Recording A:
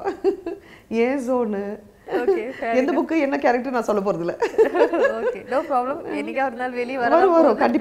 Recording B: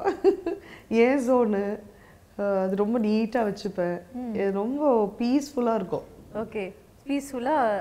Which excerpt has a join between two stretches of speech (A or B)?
A